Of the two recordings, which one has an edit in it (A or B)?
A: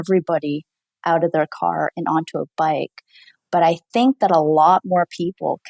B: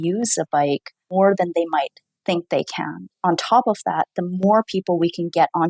B